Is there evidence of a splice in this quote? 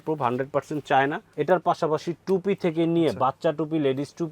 yes; 1 cut; at 1.3 s

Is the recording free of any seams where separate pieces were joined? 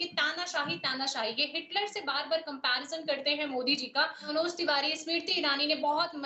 no; 1 cut; at 4.3 s

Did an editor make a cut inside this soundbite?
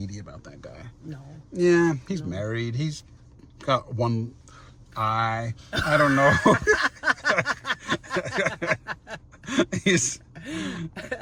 no; 0 cuts

